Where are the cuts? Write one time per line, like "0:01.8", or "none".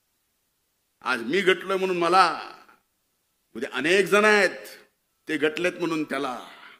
none